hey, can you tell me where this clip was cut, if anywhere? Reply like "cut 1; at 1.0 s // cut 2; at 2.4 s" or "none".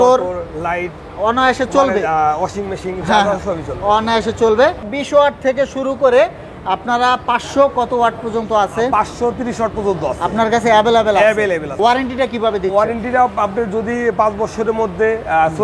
cut 1; at 4.9 s // cut 2; at 11.8 s